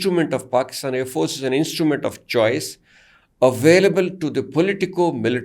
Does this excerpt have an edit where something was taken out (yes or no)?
no